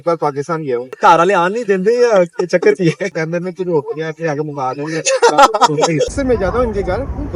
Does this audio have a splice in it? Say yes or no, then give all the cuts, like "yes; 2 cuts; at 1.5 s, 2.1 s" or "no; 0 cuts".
yes; 3 cuts; at 1.0 s, 3.1 s, 6.1 s